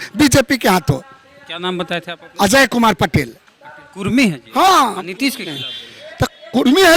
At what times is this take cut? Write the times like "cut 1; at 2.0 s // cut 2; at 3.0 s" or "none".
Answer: none